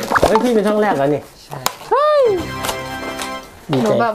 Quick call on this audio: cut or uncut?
uncut